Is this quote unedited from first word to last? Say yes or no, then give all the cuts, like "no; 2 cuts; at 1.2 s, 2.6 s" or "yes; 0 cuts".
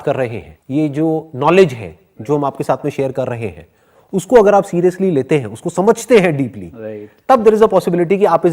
yes; 0 cuts